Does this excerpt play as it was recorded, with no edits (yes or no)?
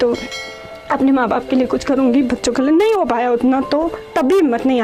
yes